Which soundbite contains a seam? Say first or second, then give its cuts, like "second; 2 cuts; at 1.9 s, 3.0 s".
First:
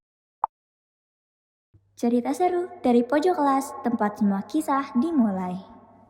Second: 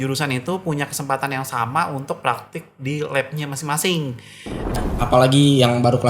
second; 1 cut; at 4.8 s